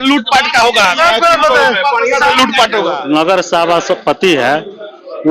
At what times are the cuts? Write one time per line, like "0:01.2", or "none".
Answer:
0:03.0